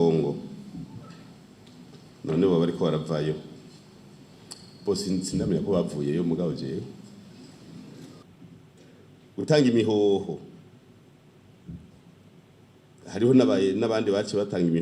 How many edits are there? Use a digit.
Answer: 1